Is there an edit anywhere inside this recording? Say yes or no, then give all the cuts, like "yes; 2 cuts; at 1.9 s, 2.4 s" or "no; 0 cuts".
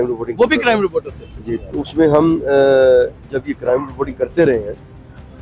no; 0 cuts